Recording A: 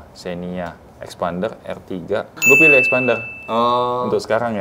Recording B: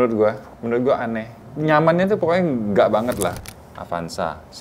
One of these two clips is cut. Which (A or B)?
B